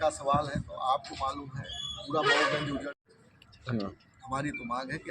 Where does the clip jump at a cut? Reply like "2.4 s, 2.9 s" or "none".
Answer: 2.9 s